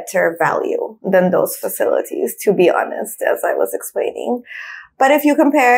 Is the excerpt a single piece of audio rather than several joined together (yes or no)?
yes